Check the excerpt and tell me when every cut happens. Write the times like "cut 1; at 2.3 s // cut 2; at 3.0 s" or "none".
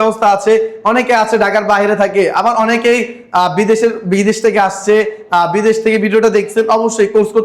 none